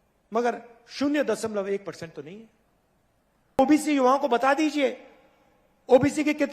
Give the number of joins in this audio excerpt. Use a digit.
1